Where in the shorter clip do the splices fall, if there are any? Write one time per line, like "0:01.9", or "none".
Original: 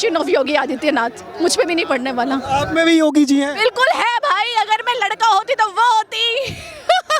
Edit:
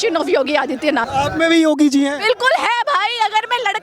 0:01.1